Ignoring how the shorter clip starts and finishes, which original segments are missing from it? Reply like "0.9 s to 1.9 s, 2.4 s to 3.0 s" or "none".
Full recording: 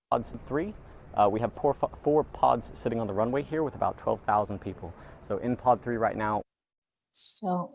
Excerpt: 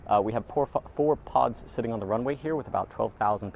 none